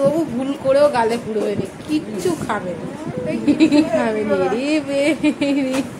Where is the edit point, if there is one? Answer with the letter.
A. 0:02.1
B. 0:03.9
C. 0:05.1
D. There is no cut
B